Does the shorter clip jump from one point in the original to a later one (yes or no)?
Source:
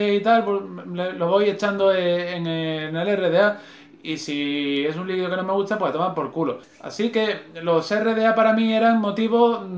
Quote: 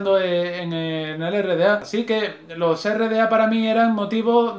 yes